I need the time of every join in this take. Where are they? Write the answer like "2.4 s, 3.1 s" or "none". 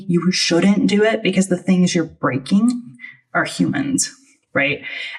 none